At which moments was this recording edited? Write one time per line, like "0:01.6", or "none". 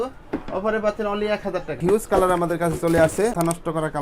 0:01.8